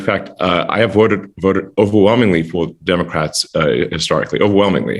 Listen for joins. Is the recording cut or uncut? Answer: uncut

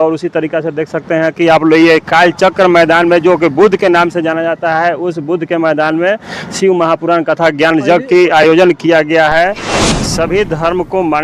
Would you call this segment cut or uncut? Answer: cut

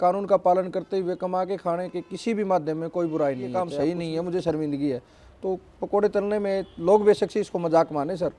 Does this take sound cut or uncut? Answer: cut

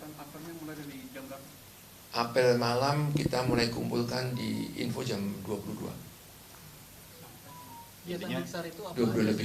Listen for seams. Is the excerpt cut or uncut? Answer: cut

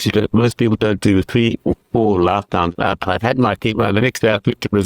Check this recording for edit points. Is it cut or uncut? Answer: cut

